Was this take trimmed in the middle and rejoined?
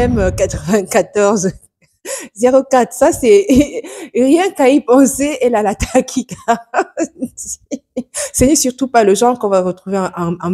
no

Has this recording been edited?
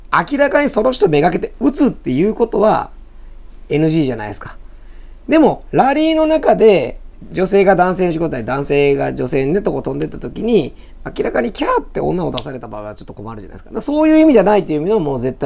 no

